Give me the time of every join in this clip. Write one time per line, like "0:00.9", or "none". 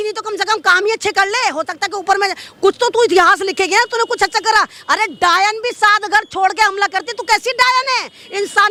none